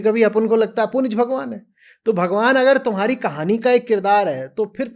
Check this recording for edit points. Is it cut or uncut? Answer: uncut